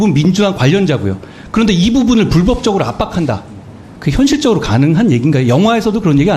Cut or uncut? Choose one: uncut